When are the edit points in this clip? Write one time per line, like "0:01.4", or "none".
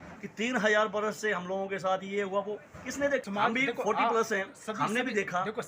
0:03.2